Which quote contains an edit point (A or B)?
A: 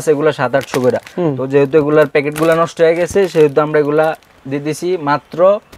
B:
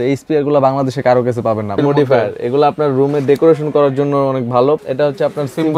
B